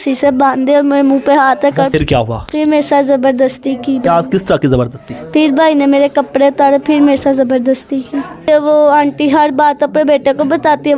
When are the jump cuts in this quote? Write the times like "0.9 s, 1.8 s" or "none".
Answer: 1.9 s, 8.5 s

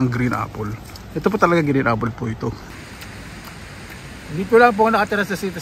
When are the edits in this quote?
2.6 s

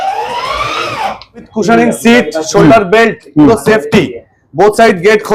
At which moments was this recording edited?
1.5 s

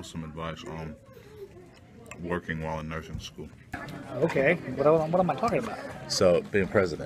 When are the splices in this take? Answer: 3.9 s

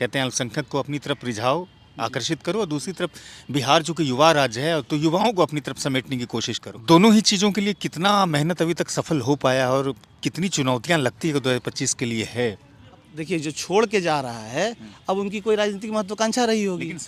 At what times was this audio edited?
6.6 s, 13.1 s

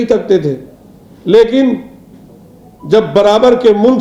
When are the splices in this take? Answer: none

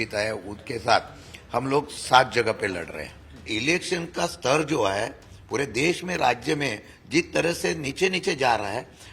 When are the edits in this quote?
3.5 s

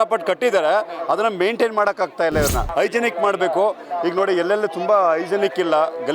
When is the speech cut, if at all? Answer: 2.7 s

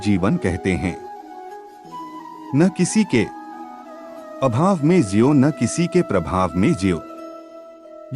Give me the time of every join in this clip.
0.9 s, 2.5 s

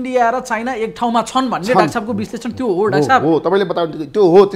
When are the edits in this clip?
none

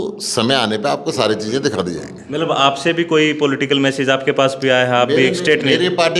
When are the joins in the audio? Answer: none

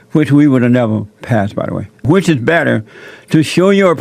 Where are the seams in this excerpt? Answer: 2.0 s

